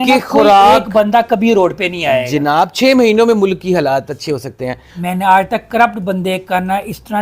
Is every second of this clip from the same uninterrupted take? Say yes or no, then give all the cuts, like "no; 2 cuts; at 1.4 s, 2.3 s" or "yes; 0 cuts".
no; 1 cut; at 5.0 s